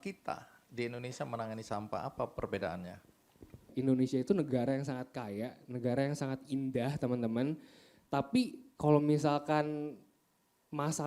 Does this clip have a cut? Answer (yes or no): yes